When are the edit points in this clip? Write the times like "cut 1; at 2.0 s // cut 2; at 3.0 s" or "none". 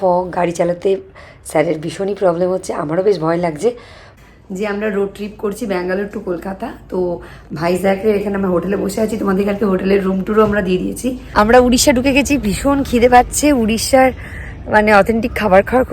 cut 1; at 4.1 s // cut 2; at 11.2 s